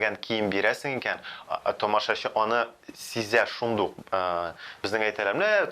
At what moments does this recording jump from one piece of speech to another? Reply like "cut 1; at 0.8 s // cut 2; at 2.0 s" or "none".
none